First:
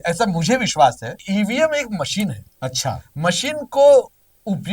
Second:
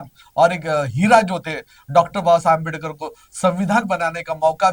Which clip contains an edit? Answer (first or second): first